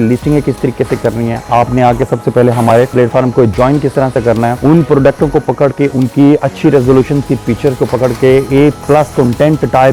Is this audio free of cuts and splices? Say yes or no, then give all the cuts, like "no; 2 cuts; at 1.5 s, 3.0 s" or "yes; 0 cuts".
yes; 0 cuts